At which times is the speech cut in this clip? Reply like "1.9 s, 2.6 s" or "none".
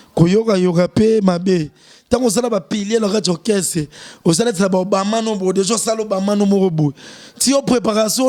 none